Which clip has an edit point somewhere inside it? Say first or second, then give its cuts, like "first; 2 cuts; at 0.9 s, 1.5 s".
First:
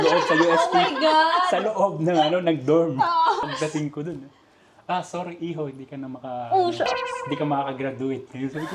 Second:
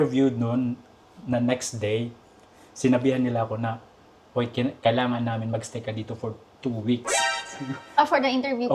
first; 1 cut; at 3.4 s